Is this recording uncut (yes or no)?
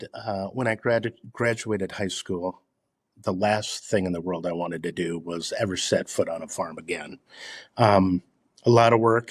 yes